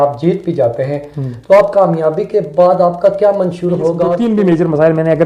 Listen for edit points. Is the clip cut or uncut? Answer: cut